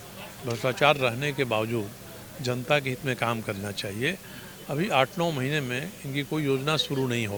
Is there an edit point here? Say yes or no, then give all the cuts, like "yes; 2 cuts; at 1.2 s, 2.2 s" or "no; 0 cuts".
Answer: no; 0 cuts